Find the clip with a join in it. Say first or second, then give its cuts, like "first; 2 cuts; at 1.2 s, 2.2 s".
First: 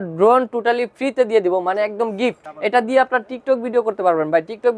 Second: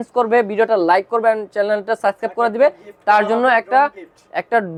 first; 1 cut; at 2.5 s